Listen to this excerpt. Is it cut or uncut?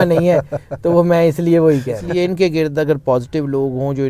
cut